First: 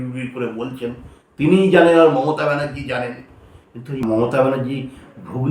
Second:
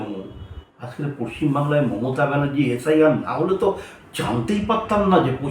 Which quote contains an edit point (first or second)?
first